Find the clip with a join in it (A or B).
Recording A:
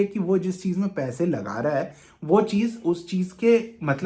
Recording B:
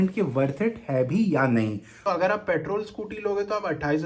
B